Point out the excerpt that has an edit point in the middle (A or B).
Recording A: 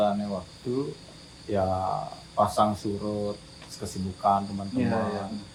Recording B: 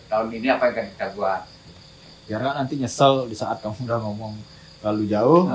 B